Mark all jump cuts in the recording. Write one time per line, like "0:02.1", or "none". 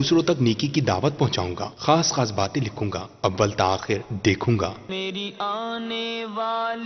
0:04.8